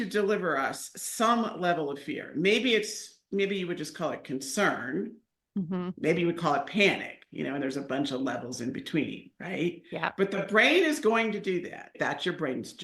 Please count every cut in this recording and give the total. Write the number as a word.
one